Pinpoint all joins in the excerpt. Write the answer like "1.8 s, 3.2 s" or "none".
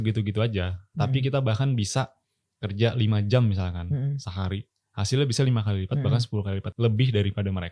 6.7 s